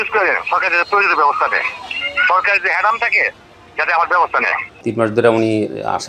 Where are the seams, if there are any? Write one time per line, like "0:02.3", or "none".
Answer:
0:04.7